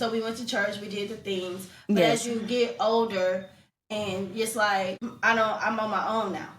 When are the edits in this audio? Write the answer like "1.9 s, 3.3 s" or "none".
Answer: 5.1 s